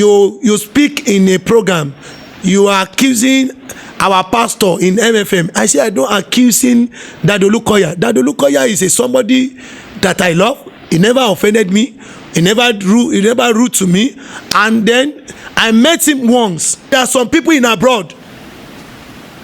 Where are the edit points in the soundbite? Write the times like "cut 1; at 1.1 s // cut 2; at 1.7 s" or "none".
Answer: cut 1; at 16.9 s